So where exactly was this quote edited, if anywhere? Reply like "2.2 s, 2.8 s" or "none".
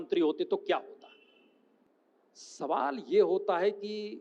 1.8 s